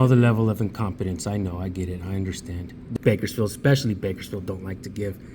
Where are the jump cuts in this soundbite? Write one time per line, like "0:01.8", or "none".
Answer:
0:02.9